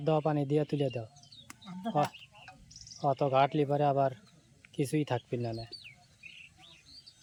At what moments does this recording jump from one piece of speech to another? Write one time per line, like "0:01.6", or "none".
none

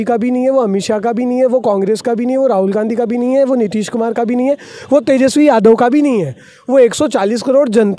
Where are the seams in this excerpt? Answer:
none

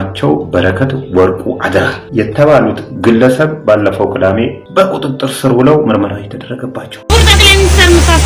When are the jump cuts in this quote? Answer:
0:02.0
0:04.6
0:06.9

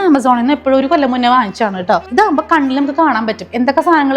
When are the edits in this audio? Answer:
0:02.1

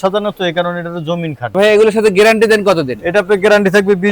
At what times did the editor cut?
0:01.6

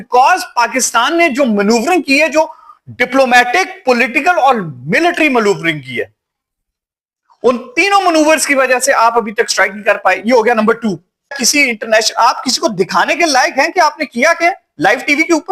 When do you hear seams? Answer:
0:11.4

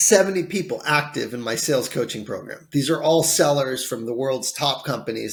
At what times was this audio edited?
none

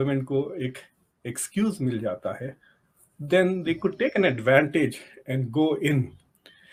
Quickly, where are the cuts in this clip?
none

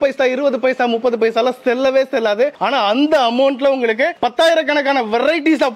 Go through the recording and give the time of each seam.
none

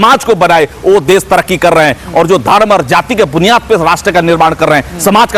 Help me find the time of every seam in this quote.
none

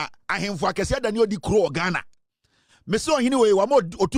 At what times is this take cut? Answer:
none

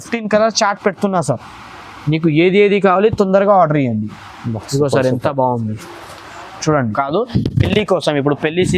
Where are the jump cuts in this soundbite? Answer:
0:06.9

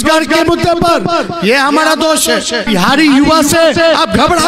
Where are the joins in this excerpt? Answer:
0:02.7

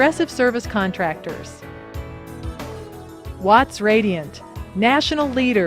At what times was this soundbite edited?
0:01.4
0:03.0

